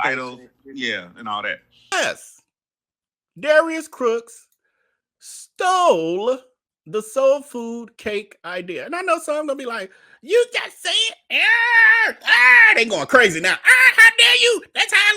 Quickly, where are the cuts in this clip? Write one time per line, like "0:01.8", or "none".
0:01.9